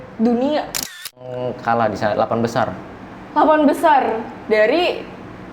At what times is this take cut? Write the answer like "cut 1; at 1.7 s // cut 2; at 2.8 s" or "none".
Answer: cut 1; at 1.2 s